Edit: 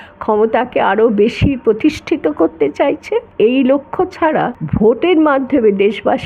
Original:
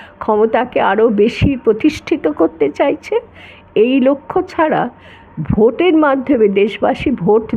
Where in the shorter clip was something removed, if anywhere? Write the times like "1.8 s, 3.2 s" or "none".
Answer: 3.3 s, 4.6 s